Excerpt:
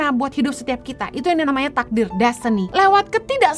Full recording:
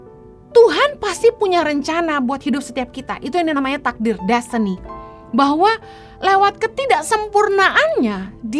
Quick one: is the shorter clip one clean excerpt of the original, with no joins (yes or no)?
no